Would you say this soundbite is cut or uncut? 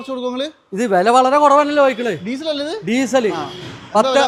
uncut